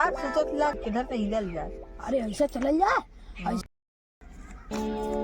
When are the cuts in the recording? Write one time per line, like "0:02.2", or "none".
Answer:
0:00.8
0:03.6